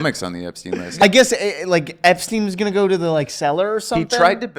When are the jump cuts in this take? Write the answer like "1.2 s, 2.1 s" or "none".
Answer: 1.0 s